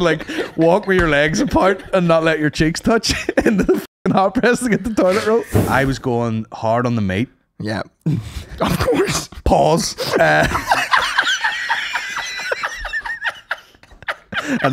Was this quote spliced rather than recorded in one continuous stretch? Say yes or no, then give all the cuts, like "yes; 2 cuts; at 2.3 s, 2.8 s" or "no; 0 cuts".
yes; 1 cut; at 5.5 s